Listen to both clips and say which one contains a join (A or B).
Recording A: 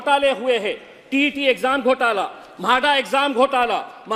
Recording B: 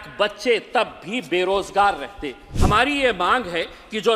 B